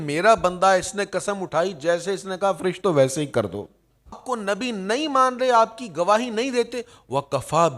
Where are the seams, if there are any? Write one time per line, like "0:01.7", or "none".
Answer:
0:04.2

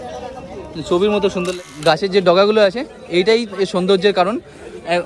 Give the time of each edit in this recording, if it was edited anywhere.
0:01.5

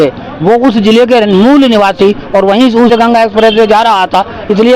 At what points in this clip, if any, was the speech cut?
0:02.9

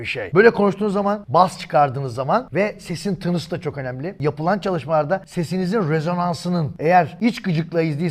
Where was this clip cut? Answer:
none

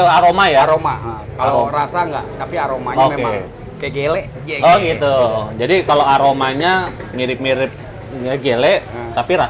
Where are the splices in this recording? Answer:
none

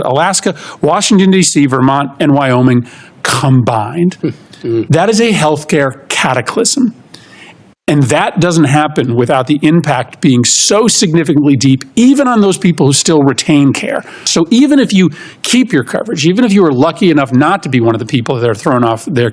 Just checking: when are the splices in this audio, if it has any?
0:14.3

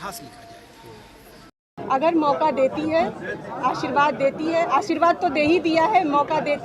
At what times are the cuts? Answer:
0:01.7

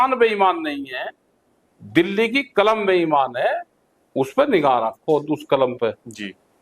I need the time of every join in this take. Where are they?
none

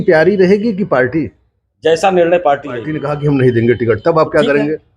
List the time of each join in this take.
0:03.0

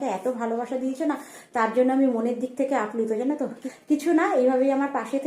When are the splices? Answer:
0:03.7

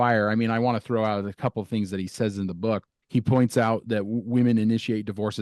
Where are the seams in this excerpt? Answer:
0:02.9

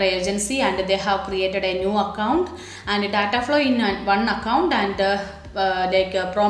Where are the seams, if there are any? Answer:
none

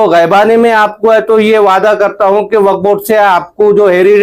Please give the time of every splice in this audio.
none

